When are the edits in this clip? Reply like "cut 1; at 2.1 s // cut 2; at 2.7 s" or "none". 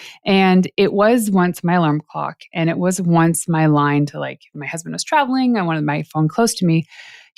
none